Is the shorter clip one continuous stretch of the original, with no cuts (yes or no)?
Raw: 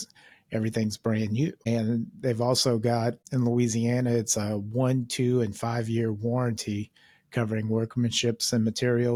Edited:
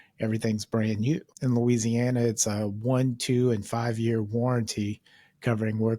no